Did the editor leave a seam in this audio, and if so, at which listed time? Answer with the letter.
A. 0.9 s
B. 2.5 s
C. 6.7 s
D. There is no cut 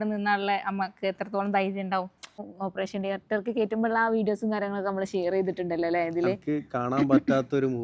B